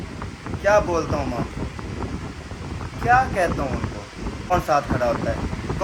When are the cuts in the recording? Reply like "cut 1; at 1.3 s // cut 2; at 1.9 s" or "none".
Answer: cut 1; at 4.5 s